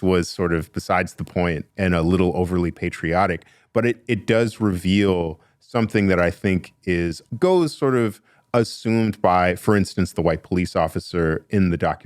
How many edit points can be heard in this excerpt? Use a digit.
2